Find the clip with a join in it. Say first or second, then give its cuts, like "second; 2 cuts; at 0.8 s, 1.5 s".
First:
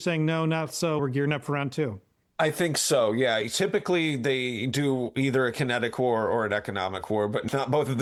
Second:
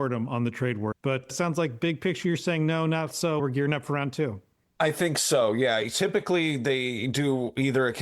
second; 1 cut; at 1.2 s